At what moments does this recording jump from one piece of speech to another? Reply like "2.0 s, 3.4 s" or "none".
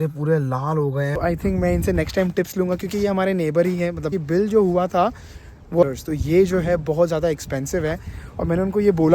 1.2 s, 4.2 s, 5.8 s